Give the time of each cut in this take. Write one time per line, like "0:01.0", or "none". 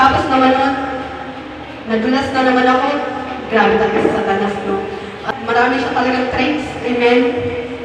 0:05.3